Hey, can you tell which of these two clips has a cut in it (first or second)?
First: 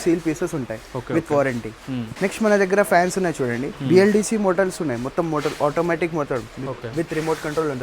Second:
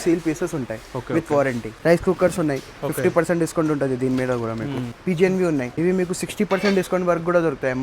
second